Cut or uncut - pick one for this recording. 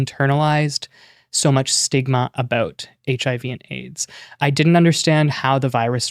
cut